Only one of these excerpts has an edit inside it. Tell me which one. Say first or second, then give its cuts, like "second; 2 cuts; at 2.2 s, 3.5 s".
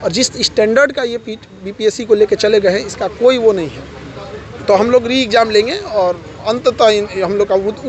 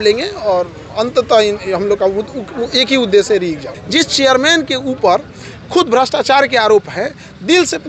second; 1 cut; at 3.7 s